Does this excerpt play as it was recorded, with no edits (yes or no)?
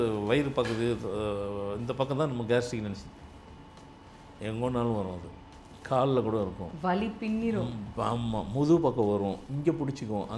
yes